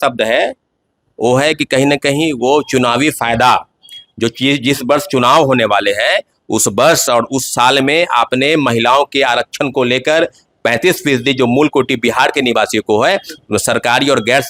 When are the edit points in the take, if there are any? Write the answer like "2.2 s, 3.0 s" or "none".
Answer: none